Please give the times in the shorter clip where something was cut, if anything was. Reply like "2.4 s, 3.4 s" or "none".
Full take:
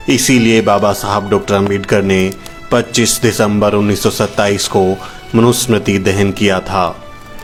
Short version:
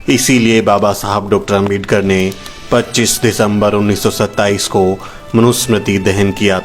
none